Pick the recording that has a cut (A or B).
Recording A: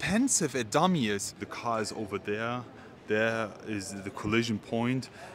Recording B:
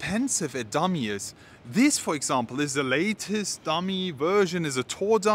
A